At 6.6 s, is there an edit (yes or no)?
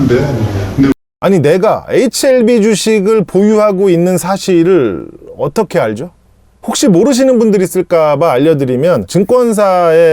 no